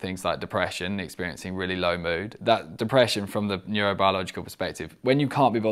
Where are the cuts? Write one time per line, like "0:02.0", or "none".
none